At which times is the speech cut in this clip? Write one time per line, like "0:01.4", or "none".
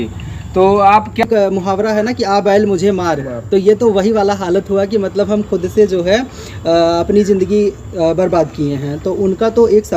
0:01.2

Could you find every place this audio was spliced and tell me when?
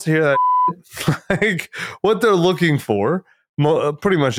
none

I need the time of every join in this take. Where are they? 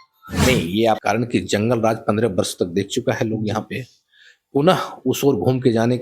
0:01.0

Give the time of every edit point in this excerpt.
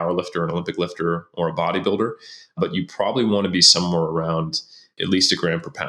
0:02.5
0:04.9

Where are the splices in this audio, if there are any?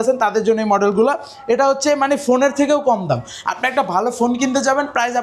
none

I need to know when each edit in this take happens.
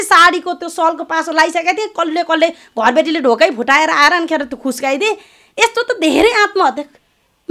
none

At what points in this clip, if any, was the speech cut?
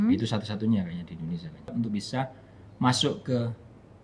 0:01.7

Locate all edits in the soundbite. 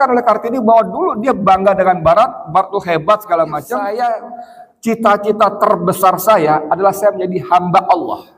0:03.7

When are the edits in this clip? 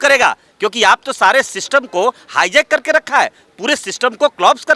none

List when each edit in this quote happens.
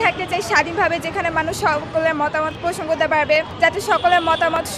0:02.5
0:03.5

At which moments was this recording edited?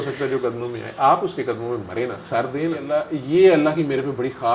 0:02.9

